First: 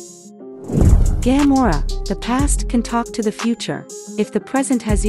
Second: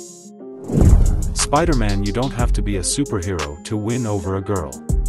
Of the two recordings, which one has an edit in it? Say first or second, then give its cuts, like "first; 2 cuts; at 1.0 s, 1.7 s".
first; 1 cut; at 0.9 s